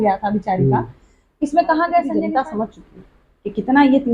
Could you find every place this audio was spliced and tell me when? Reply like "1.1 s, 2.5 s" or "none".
2.2 s